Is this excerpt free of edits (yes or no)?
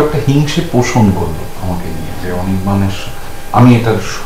yes